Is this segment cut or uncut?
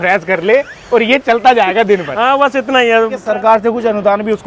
cut